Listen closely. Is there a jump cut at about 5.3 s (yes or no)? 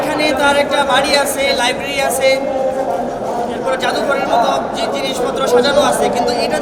no